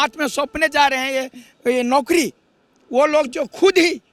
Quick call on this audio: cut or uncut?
uncut